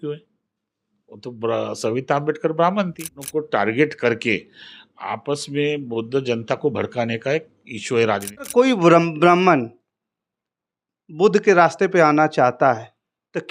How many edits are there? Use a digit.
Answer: 2